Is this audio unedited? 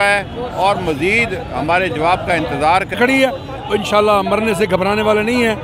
no; 1 cut; at 3.0 s

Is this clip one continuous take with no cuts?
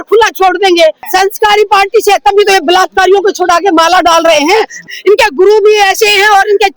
no; 2 cuts; at 1.0 s, 4.8 s

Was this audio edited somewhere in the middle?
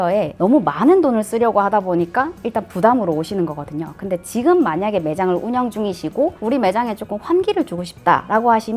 no; 0 cuts

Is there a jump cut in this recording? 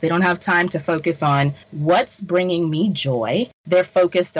yes; 2 cuts; at 1.6 s, 3.6 s

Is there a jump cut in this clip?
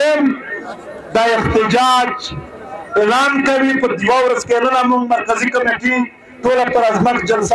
no; 0 cuts

